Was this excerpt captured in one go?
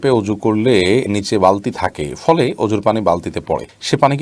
yes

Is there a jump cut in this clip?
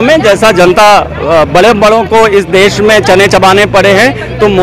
no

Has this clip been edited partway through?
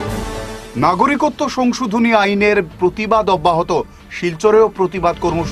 no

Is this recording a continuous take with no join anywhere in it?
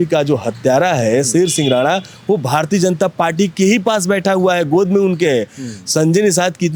yes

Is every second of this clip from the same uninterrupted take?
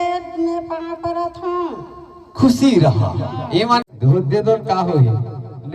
no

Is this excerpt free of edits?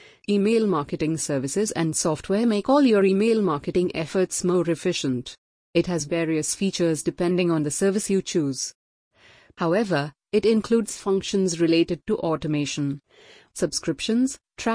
no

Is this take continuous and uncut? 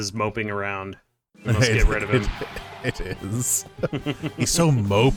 yes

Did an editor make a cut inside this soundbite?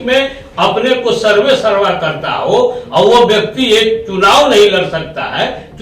no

